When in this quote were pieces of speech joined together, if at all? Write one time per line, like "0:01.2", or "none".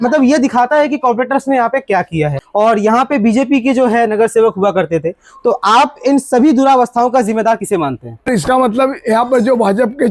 0:02.4
0:08.3